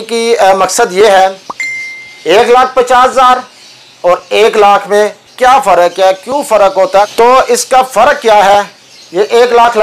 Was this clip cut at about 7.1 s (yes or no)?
yes